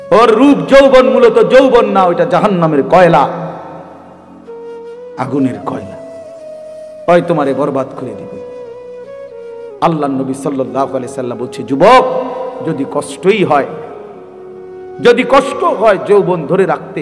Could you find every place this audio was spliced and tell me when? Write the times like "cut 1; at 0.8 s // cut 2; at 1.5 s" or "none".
cut 1; at 3.8 s // cut 2; at 5.2 s